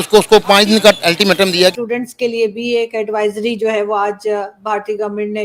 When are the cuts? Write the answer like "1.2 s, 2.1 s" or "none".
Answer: 1.7 s

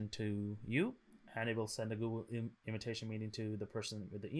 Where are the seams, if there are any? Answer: none

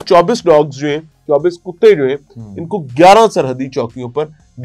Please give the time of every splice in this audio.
none

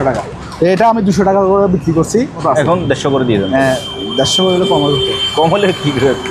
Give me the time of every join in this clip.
2.4 s

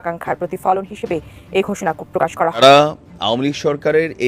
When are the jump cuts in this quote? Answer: 2.6 s

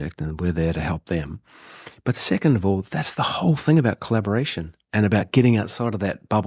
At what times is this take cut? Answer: none

